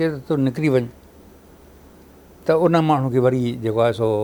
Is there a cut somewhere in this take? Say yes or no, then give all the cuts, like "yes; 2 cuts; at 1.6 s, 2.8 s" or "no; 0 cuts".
no; 0 cuts